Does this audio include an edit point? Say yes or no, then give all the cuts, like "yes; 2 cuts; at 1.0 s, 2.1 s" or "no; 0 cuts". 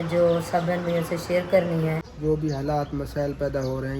yes; 1 cut; at 2.1 s